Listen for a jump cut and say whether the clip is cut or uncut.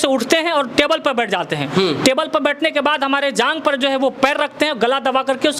uncut